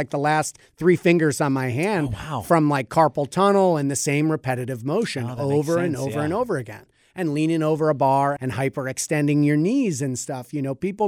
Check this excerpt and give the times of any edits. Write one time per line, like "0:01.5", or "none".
0:08.4